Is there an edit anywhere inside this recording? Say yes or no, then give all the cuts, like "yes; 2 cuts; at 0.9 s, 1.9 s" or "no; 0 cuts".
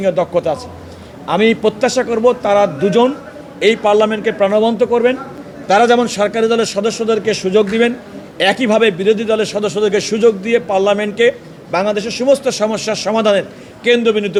no; 0 cuts